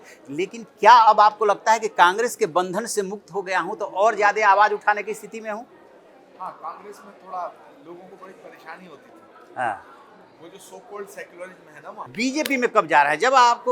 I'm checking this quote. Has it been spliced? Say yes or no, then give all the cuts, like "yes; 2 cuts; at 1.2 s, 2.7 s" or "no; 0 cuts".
yes; 1 cut; at 12.1 s